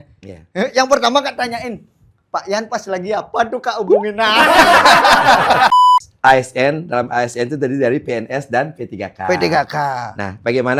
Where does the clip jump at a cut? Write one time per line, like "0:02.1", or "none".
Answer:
0:05.7